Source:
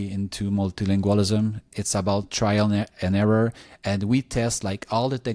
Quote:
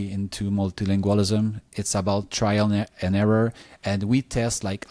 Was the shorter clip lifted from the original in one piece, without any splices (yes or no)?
yes